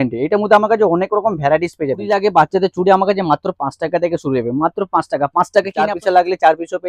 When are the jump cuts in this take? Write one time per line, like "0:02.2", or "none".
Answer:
0:02.1
0:05.8